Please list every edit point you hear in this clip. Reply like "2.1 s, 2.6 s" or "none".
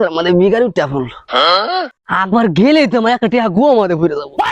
2.0 s